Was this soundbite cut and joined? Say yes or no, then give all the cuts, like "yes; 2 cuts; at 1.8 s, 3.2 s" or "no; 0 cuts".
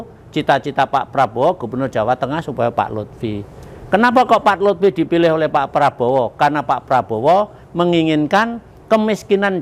no; 0 cuts